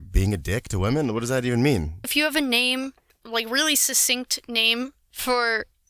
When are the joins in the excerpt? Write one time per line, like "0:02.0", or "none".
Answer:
0:02.1